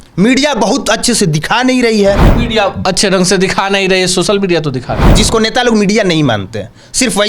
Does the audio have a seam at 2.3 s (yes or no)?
yes